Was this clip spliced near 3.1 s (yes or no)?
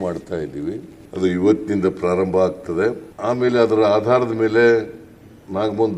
yes